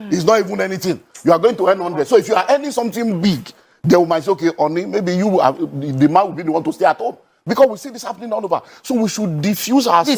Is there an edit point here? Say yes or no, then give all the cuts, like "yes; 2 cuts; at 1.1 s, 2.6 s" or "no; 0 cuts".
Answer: no; 0 cuts